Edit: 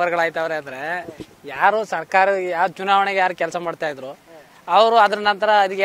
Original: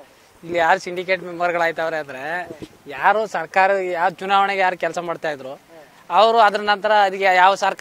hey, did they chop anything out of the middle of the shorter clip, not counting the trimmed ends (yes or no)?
no